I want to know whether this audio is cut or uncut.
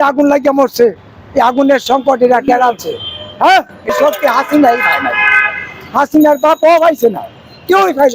cut